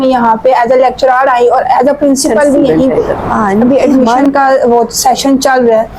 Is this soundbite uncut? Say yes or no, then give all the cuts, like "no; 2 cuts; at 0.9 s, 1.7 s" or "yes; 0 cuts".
no; 1 cut; at 3.6 s